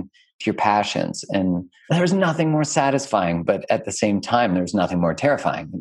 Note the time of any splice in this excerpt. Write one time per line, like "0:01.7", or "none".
0:01.7